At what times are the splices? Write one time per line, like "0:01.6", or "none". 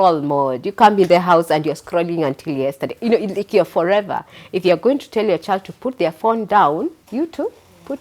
0:07.0